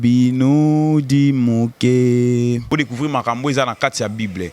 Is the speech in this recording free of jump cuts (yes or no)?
no